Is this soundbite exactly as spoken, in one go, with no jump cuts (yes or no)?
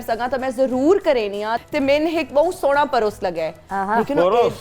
no